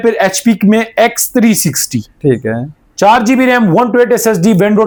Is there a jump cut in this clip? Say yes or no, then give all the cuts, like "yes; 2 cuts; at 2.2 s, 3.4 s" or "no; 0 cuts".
no; 0 cuts